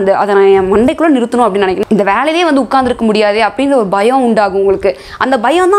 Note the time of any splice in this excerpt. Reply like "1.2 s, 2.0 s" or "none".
1.8 s